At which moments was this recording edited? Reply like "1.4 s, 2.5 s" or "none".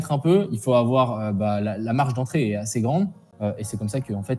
3.3 s